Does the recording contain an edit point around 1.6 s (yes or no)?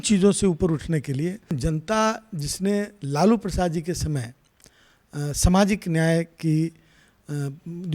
yes